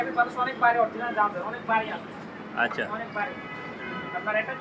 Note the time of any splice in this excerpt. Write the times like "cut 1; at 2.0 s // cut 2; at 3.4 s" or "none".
none